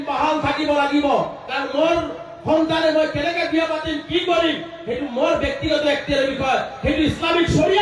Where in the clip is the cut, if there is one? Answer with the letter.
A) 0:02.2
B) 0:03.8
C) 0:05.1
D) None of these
D